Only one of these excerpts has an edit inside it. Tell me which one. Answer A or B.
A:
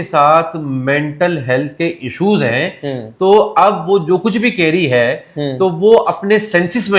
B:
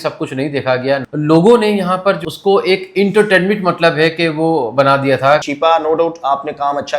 B